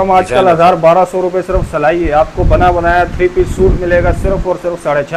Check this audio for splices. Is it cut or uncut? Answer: uncut